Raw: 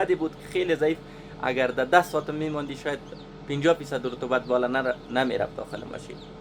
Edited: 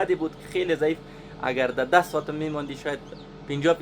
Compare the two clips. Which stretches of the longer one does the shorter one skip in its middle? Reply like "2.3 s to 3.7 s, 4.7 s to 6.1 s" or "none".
none